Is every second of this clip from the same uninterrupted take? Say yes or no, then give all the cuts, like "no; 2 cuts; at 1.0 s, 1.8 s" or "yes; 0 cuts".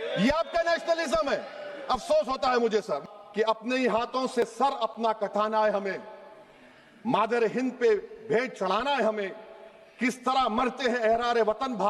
no; 1 cut; at 3.0 s